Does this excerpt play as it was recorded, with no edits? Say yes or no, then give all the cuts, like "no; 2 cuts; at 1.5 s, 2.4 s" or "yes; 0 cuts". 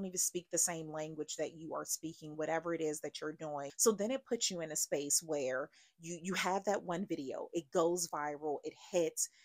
no; 1 cut; at 3.7 s